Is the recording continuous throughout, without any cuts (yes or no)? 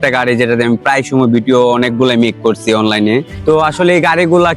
no